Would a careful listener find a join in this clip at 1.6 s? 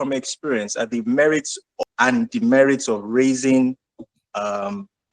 yes; 1 cut; at 1.6 s

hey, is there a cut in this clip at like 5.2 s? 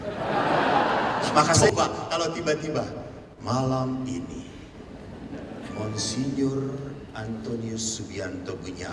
no; 1 cut; at 1.6 s

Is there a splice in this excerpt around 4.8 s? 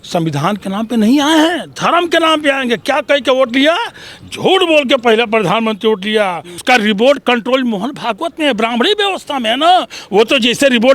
no; 1 cut; at 6.5 s

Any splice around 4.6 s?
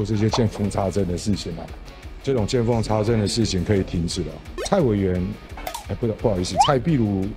yes; 1 cut; at 4.6 s

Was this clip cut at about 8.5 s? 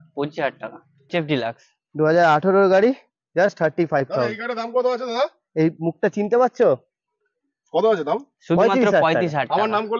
no; 1 cut; at 1.1 s

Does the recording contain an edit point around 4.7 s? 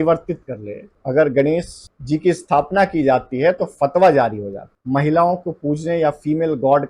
yes; 2 cuts; at 0.9 s, 4.7 s

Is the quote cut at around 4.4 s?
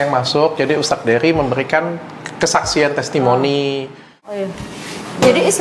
yes; 1 cut; at 4.4 s

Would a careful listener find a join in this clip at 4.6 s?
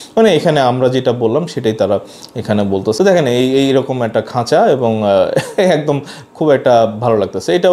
no; 0 cuts

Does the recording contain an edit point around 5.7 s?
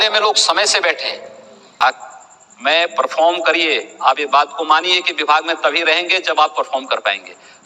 no; 1 cut; at 1.8 s

